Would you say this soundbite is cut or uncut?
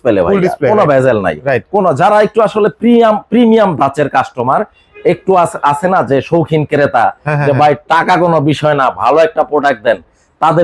uncut